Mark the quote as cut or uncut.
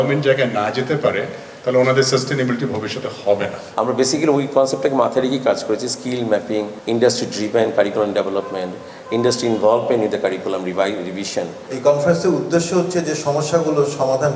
cut